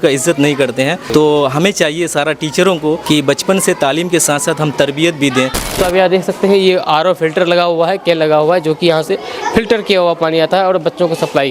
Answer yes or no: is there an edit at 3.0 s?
yes